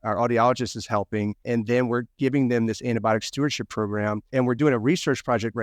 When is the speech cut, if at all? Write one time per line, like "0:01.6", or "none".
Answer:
0:01.4
0:04.3